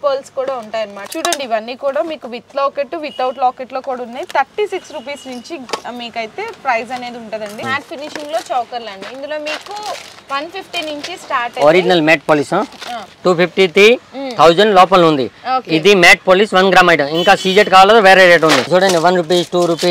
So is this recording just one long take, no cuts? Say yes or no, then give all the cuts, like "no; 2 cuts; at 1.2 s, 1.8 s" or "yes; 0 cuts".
no; 4 cuts; at 1.0 s, 7.6 s, 13.2 s, 18.7 s